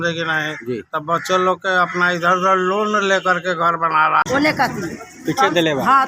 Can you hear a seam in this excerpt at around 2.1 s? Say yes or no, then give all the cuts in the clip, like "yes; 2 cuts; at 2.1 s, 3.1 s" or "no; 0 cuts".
no; 1 cut; at 4.2 s